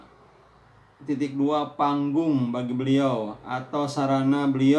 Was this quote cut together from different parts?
no; 0 cuts

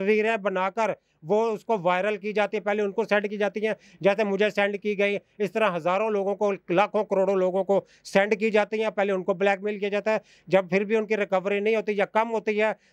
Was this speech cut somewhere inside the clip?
no; 0 cuts

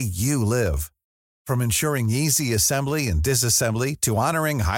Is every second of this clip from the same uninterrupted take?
yes; 0 cuts

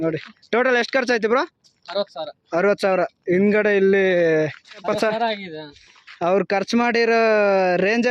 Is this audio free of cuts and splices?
no; 1 cut; at 4.8 s

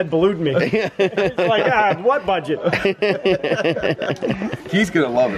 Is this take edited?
no; 0 cuts

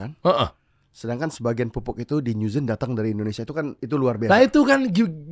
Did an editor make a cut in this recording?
no; 0 cuts

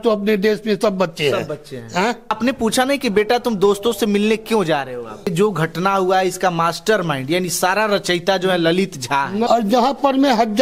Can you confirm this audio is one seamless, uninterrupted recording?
no; 3 cuts; at 2.3 s, 5.3 s, 9.5 s

